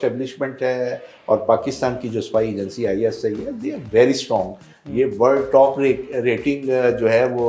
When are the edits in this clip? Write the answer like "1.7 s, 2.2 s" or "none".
none